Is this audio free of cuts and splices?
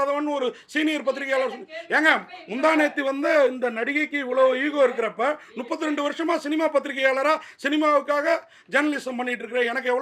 yes; 0 cuts

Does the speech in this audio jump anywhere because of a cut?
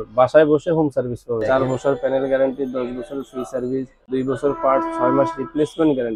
yes; 2 cuts; at 1.4 s, 4.0 s

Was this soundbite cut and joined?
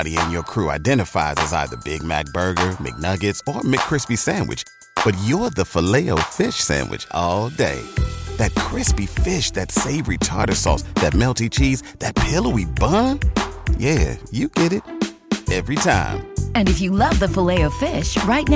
no; 0 cuts

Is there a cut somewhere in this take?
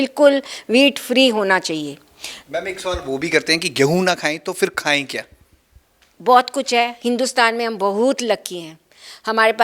no; 0 cuts

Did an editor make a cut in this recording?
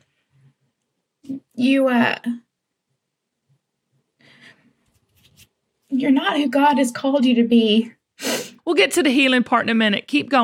yes; 1 cut; at 8.5 s

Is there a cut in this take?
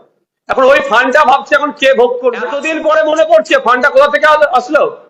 yes; 1 cut; at 2.7 s

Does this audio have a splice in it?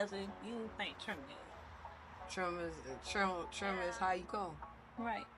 yes; 1 cut; at 1.6 s

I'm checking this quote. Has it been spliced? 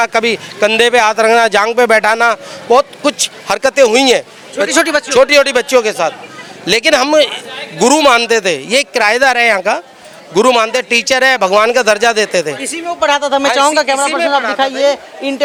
no; 0 cuts

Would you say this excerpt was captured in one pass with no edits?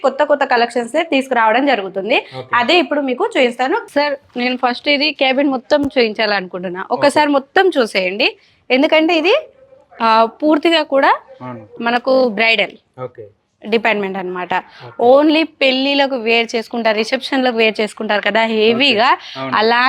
no; 1 cut; at 3.9 s

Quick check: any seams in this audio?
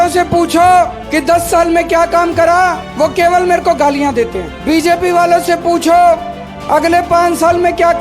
yes; 3 cuts; at 1.0 s, 2.8 s, 4.5 s

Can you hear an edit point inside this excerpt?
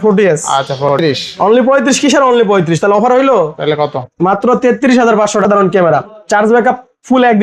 yes; 2 cuts; at 1.0 s, 5.5 s

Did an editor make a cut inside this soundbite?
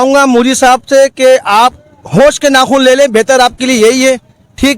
no; 0 cuts

